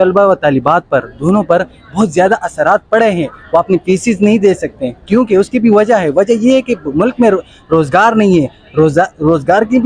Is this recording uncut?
yes; 0 cuts

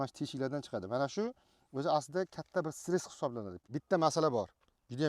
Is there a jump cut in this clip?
yes; 1 cut; at 3.6 s

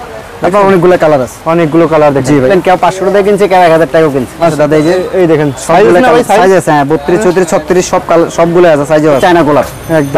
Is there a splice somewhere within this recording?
yes; 3 cuts; at 2.5 s, 4.5 s, 9.2 s

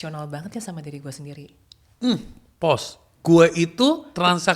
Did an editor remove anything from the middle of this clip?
no; 0 cuts

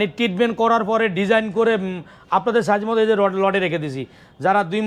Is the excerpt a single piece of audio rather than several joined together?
yes; 0 cuts

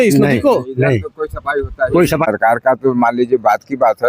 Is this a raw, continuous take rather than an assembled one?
no; 1 cut; at 2.3 s

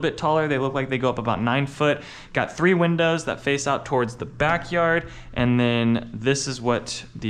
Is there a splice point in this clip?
no; 0 cuts

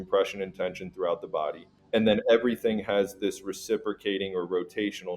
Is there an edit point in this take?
yes; 1 cut; at 1.7 s

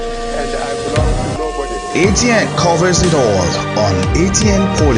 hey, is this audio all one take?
yes; 0 cuts

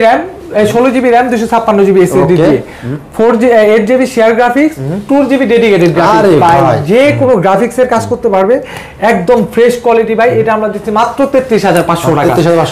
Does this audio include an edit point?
no; 0 cuts

